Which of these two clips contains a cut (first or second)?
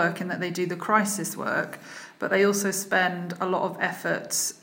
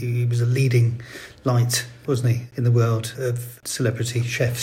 second